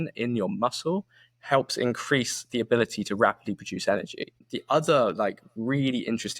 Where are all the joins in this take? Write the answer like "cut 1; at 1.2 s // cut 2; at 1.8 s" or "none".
cut 1; at 4.5 s